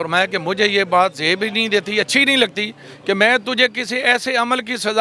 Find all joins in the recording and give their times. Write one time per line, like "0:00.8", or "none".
none